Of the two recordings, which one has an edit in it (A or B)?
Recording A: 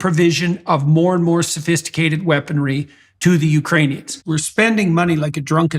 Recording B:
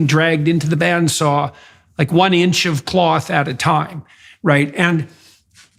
A